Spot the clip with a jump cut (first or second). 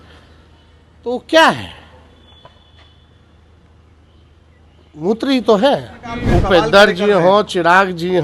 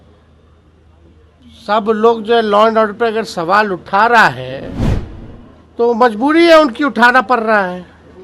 first